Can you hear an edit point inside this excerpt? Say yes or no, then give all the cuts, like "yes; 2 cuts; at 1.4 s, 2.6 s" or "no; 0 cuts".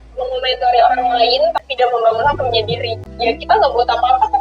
yes; 1 cut; at 1.7 s